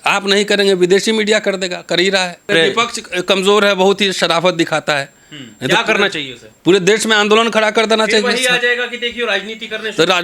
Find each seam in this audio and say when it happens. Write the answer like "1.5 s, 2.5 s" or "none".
2.5 s